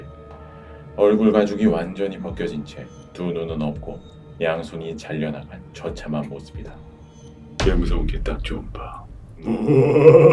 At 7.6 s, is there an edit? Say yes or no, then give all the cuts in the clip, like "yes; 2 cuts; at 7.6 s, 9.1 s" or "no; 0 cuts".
yes; 1 cut; at 7.6 s